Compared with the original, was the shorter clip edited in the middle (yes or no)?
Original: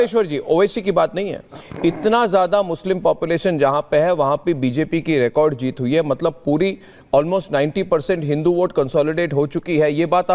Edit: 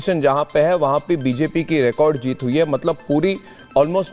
no